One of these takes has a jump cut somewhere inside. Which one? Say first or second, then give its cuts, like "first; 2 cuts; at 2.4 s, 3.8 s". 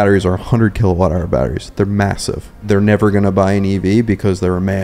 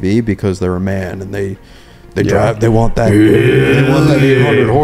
first; 1 cut; at 2.6 s